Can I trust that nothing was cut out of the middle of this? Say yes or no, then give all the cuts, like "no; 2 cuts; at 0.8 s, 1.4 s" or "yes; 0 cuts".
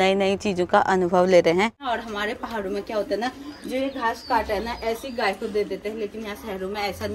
no; 1 cut; at 1.9 s